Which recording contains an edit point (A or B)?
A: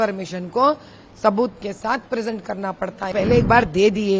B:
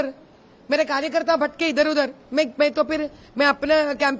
A